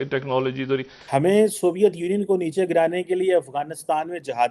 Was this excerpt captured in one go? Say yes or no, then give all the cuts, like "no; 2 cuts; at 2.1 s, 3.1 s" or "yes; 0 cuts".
no; 1 cut; at 0.9 s